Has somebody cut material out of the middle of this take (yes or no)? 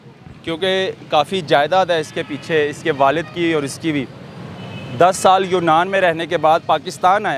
no